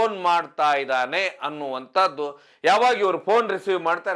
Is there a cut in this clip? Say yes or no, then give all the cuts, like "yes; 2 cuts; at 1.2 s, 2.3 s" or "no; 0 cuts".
no; 0 cuts